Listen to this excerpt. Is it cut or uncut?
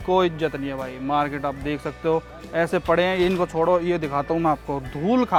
uncut